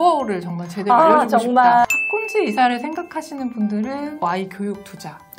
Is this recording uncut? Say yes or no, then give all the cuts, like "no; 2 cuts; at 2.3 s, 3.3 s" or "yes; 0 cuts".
no; 1 cut; at 1.8 s